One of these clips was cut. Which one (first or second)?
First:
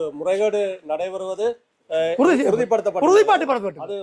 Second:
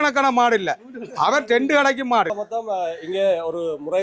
second